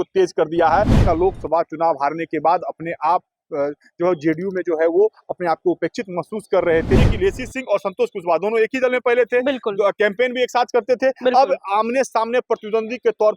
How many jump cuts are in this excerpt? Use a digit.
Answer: 2